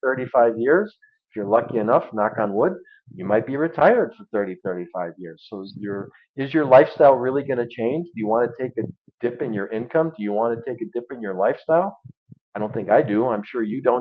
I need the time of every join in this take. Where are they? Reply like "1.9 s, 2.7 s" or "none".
none

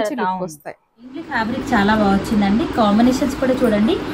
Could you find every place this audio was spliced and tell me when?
1.4 s

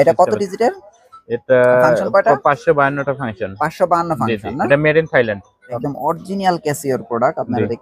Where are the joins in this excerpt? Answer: 5.8 s

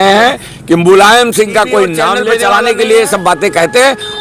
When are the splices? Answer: 2.3 s

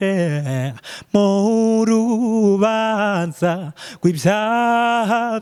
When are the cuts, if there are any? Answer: none

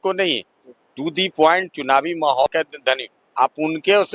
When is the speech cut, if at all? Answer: 2.5 s

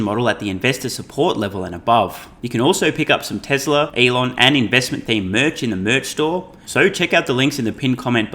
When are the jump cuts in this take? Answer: 2.3 s, 3.9 s, 6.6 s

